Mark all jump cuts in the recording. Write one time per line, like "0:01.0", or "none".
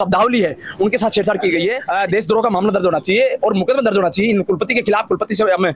0:01.8

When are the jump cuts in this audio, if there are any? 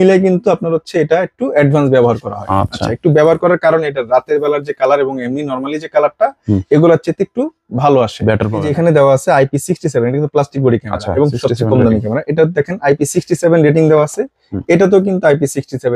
0:08.7

